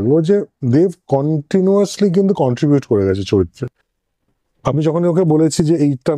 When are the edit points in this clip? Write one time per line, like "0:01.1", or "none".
none

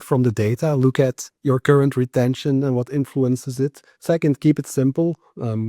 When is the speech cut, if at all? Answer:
0:01.3

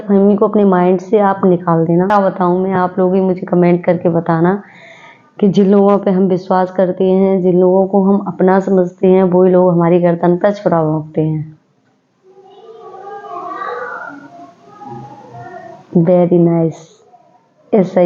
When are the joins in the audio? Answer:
0:02.1

